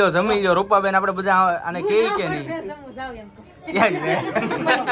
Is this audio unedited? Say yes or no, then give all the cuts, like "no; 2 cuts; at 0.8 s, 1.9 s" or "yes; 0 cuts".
yes; 0 cuts